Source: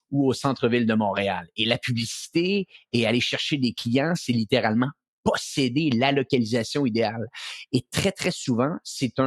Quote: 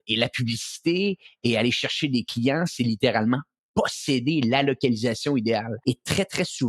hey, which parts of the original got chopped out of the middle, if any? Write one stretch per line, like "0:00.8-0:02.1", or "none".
0:07.2-0:07.6